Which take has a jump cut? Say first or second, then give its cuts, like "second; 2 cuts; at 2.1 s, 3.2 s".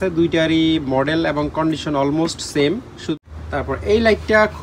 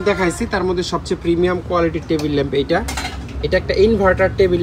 first; 1 cut; at 3.2 s